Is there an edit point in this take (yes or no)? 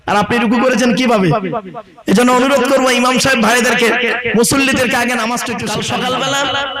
yes